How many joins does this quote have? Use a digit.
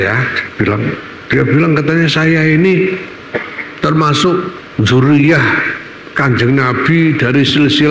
1